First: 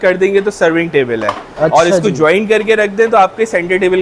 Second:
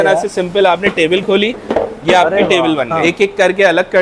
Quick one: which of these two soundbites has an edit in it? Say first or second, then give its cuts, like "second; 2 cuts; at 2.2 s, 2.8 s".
second; 1 cut; at 2.9 s